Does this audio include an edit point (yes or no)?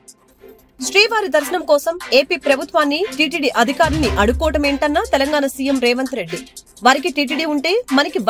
yes